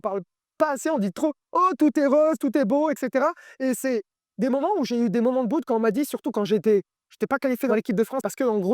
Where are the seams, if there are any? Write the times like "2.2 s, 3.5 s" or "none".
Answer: 7.7 s

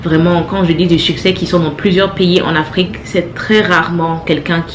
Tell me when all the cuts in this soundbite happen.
3.0 s

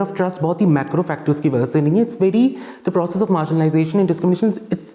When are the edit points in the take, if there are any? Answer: none

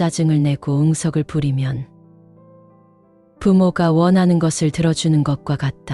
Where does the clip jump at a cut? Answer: 1.9 s, 3.3 s

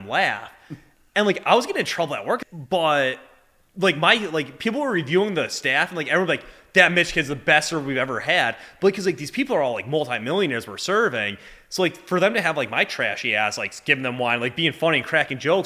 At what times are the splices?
2.4 s

